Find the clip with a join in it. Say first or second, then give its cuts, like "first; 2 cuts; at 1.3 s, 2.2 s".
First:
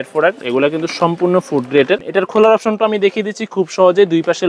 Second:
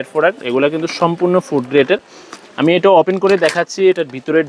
first; 1 cut; at 2.0 s